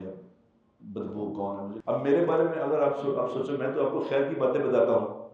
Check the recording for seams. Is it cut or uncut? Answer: cut